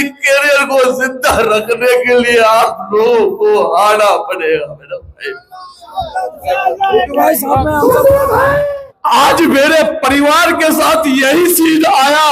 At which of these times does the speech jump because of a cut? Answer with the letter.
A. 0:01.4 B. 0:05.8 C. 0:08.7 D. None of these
C